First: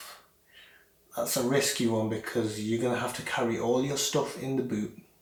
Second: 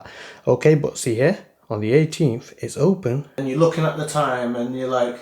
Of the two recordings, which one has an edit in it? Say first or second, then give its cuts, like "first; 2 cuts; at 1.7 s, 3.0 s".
second; 1 cut; at 3.4 s